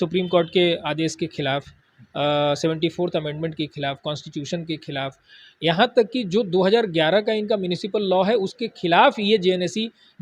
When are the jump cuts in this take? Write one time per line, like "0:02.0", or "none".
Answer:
none